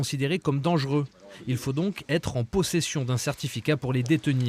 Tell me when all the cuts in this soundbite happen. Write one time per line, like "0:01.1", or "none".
0:01.6

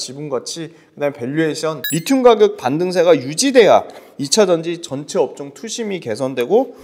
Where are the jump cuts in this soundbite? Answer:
0:01.8

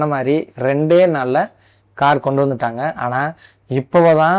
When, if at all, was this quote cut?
none

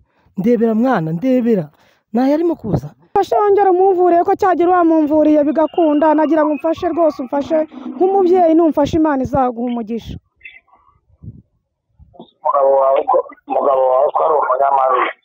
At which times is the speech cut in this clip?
0:03.1

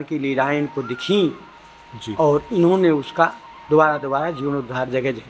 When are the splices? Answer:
none

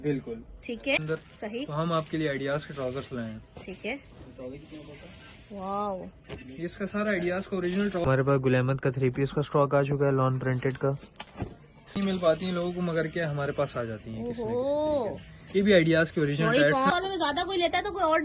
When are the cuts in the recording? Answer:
0:01.0
0:08.0
0:12.0
0:16.9

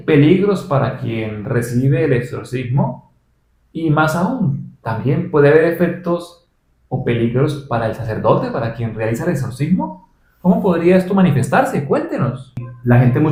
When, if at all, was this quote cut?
none

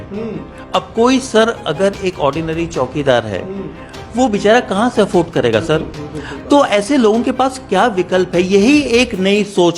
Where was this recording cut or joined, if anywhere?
none

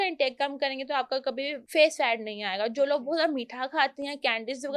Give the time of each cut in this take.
0:01.6

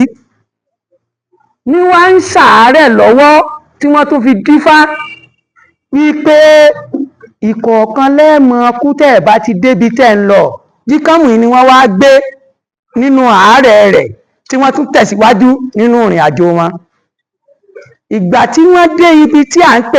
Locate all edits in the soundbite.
none

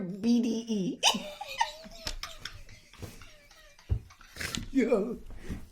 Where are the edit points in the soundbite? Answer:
0:04.1

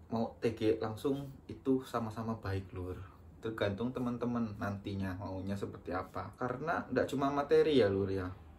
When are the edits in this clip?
0:06.3

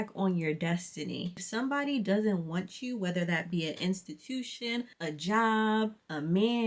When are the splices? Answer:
0:01.3

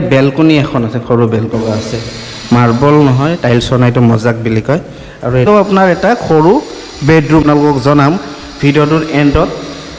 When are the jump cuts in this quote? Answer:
0:01.5
0:05.5
0:07.4

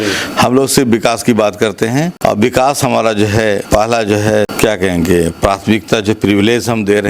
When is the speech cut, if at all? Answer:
0:02.1
0:03.6
0:04.5

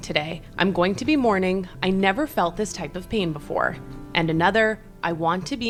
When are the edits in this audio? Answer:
none

